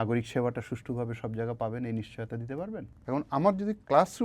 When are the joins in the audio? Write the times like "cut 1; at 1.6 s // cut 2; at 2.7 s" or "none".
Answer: cut 1; at 2.9 s